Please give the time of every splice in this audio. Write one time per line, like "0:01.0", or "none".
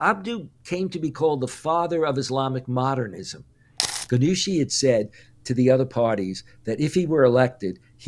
0:03.8